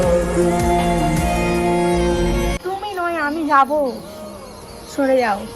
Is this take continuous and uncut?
no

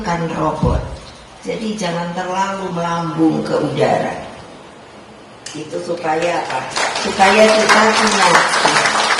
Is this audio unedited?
yes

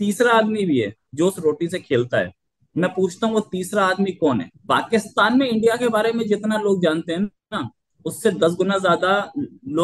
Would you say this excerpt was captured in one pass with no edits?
no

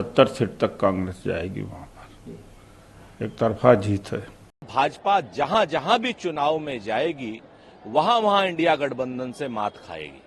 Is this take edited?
yes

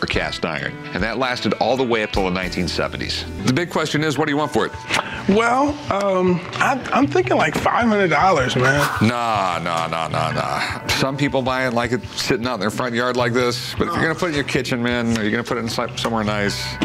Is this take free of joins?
yes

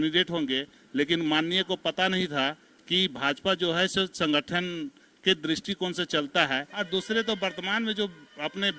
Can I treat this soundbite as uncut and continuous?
no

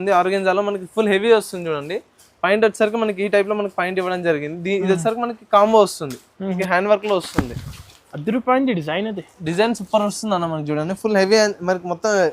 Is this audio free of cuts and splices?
no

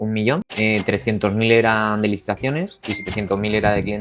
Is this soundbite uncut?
yes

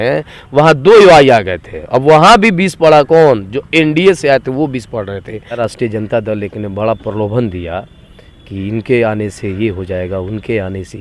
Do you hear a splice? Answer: yes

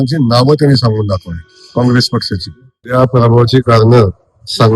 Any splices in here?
yes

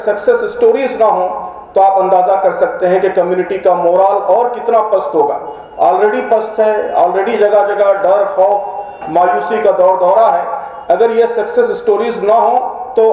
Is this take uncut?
yes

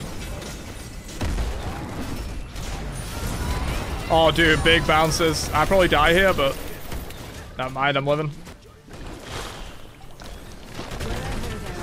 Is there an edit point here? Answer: yes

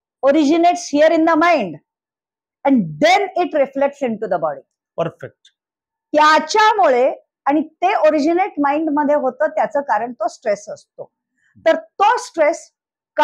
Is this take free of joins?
yes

